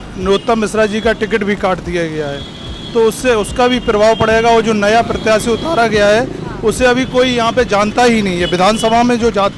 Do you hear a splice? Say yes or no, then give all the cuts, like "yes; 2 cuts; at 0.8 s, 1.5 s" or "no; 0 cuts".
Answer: no; 0 cuts